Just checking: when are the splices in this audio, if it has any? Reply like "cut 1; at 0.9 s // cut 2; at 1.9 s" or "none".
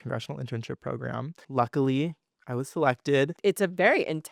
cut 1; at 1.4 s // cut 2; at 3.3 s